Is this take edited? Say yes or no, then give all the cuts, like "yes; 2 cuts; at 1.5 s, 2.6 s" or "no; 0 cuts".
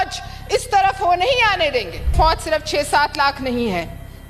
yes; 1 cut; at 2.1 s